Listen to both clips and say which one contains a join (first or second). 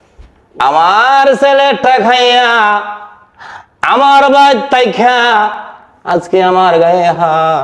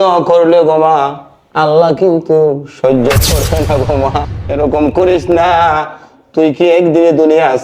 second